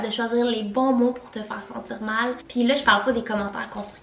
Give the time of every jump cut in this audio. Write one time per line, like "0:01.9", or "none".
none